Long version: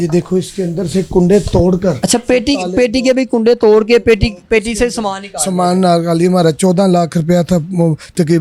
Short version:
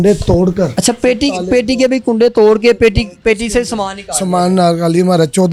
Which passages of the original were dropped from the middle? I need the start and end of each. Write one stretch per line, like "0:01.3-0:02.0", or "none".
none